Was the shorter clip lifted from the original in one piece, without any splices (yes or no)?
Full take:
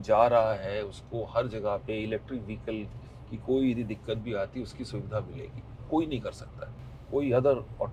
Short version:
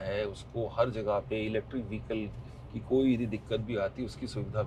yes